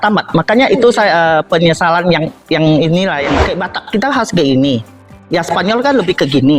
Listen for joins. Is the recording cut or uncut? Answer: cut